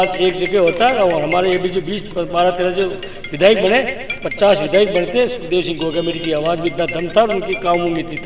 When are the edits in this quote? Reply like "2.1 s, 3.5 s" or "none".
none